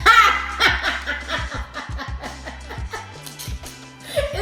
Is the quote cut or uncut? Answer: uncut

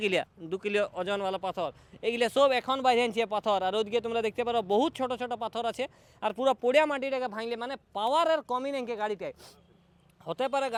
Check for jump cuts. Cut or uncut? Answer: uncut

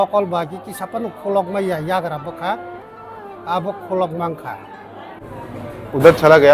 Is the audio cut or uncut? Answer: cut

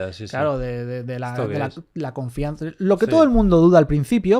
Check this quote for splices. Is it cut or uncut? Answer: uncut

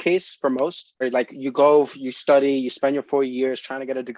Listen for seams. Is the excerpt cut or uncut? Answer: cut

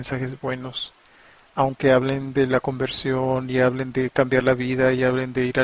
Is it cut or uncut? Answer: uncut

